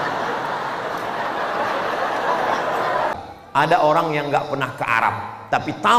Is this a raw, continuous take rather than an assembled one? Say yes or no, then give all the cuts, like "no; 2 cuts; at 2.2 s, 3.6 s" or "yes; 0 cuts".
no; 1 cut; at 3.1 s